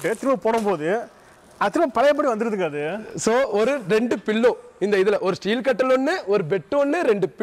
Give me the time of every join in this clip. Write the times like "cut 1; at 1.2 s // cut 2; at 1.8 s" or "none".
none